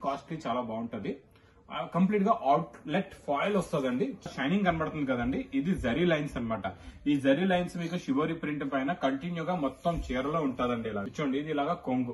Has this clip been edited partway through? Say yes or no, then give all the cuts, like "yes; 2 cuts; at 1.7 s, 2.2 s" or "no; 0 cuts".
yes; 2 cuts; at 4.3 s, 11.0 s